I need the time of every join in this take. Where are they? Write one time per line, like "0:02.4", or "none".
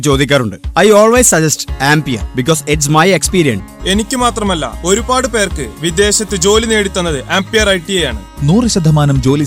0:03.7